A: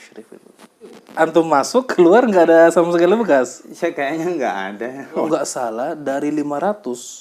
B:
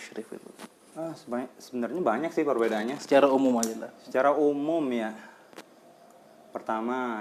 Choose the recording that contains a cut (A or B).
A